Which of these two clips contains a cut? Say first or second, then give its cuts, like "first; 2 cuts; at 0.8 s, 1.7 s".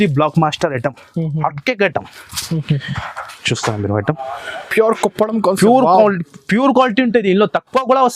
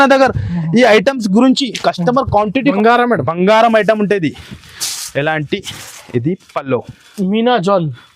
second; 1 cut; at 2.7 s